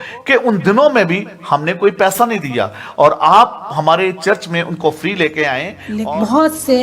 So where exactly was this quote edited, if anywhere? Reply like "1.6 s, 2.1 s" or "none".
5.8 s